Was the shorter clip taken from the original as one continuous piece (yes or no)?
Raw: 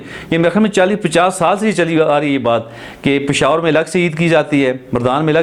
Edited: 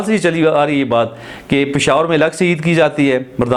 yes